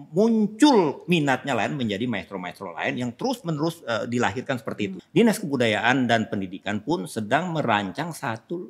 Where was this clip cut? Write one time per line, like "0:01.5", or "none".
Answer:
0:05.0